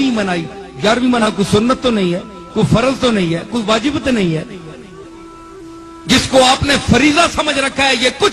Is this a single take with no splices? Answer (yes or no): no